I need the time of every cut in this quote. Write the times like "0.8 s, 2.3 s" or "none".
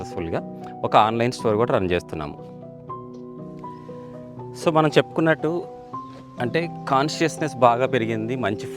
none